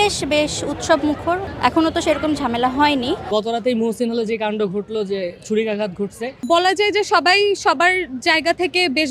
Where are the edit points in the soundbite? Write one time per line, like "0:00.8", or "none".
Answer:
0:03.3
0:06.4